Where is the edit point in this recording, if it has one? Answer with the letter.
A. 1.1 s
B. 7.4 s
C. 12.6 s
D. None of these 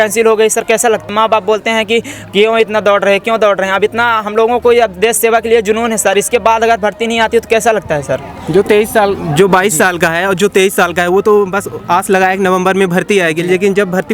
A